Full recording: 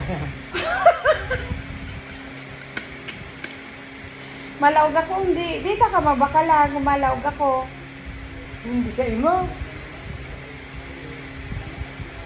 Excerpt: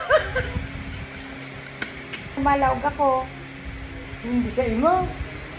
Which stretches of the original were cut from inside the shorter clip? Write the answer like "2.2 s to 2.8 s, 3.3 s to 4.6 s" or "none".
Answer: 3.3 s to 6.8 s

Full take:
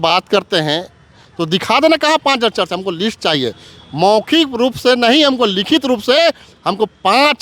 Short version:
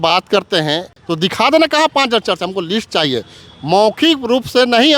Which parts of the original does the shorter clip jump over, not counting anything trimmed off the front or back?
1.0 s to 1.3 s

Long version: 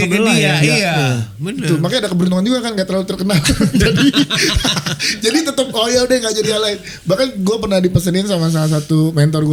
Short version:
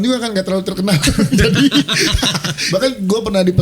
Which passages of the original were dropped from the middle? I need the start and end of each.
5.0 s to 6.9 s

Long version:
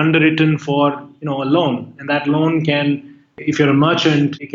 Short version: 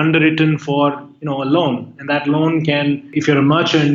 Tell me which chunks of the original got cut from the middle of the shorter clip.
3.1 s to 3.4 s

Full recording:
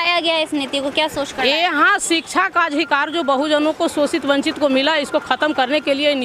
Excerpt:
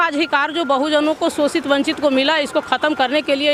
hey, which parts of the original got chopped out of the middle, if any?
none

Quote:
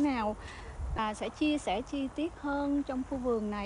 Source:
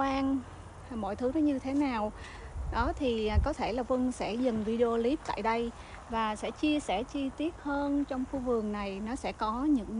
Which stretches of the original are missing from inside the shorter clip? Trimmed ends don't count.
2.7 s to 6.2 s

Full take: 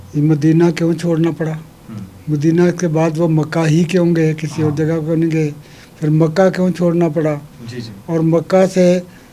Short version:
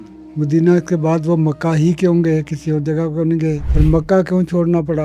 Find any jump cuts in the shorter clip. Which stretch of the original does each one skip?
5.6 s to 5.9 s

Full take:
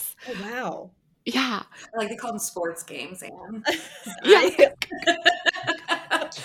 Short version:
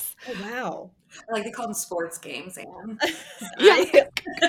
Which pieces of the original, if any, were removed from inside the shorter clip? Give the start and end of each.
1.1 s to 1.7 s

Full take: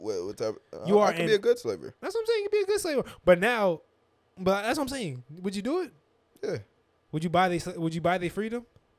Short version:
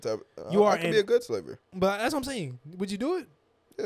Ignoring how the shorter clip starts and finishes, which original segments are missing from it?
1.9 s to 4.2 s

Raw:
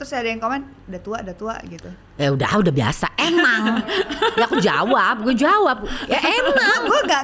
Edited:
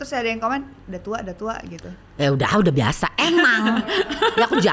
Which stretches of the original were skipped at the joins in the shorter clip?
none

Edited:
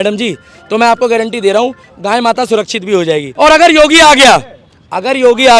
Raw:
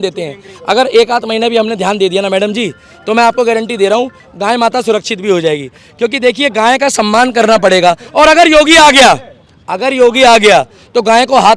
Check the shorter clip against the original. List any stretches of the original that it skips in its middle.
5.6 s to 8.1 s

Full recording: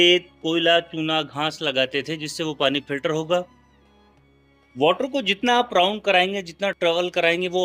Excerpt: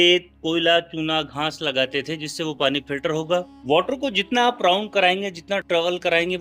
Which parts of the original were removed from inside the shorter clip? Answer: 3.5 s to 4.7 s

